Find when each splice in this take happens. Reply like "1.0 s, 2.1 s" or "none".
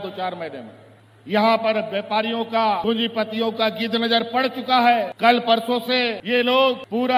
none

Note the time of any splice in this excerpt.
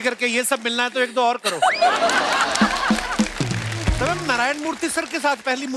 4.0 s

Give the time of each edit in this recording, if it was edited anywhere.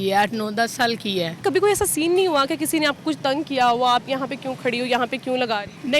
1.4 s

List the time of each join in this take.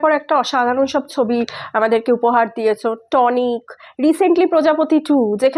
none

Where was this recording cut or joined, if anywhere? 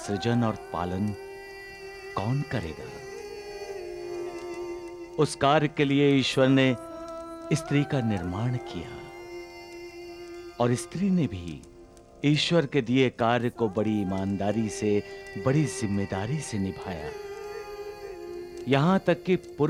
none

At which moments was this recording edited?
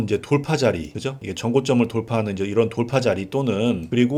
none

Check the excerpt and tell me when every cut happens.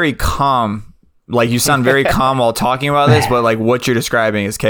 none

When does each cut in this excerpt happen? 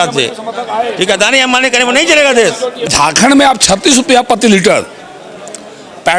2.8 s

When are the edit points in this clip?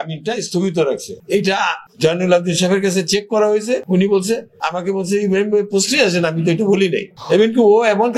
1.5 s, 3.8 s, 4.6 s, 7.1 s

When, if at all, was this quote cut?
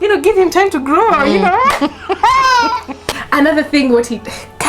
3.2 s

